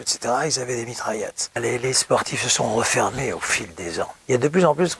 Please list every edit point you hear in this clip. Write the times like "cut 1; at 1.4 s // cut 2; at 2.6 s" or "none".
cut 1; at 1.6 s // cut 2; at 4.1 s

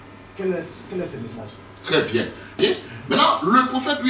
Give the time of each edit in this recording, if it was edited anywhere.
cut 1; at 2.6 s

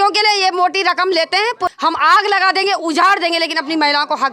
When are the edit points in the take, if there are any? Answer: cut 1; at 1.7 s

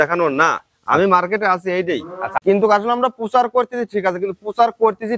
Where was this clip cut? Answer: cut 1; at 2.2 s

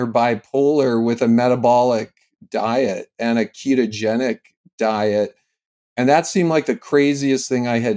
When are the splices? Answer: none

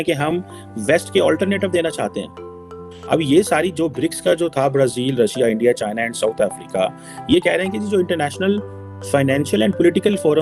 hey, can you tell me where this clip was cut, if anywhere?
none

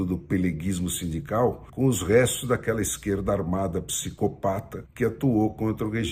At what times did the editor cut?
cut 1; at 1.7 s // cut 2; at 4.8 s

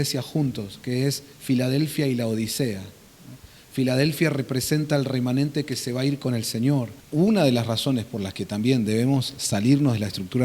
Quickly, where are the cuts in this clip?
cut 1; at 7.0 s

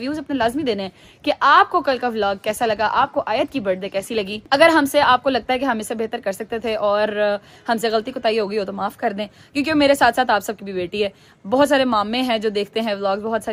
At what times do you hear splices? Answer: none

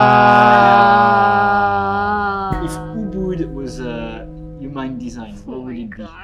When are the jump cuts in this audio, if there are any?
cut 1; at 2.7 s

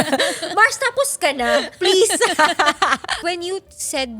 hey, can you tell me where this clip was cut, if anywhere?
cut 1; at 3.2 s

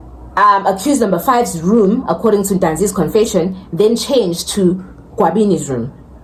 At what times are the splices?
none

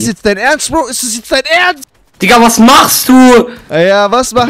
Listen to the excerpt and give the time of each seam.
cut 1; at 1.9 s

